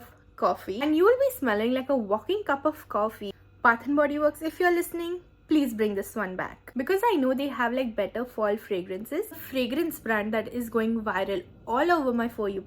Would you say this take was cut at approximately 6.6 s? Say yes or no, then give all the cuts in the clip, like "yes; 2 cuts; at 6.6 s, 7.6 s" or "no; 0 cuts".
yes; 4 cuts; at 0.9 s, 3.3 s, 6.6 s, 9.4 s